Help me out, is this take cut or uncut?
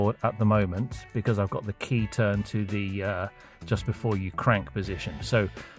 uncut